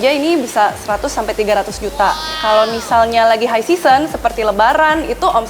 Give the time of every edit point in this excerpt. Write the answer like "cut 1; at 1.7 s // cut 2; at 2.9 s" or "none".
cut 1; at 2.3 s

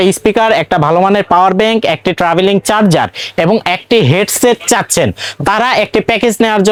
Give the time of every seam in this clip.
none

